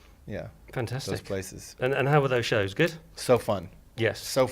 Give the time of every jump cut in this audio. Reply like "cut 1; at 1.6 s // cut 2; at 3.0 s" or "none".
cut 1; at 3.1 s